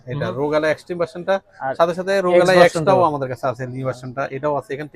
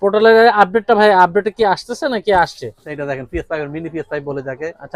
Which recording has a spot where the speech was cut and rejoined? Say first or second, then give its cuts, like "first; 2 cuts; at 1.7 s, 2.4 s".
second; 1 cut; at 2.9 s